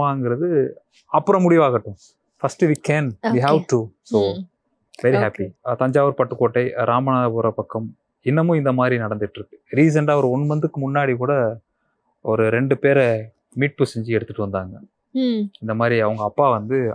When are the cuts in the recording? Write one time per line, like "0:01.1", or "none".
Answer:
0:05.5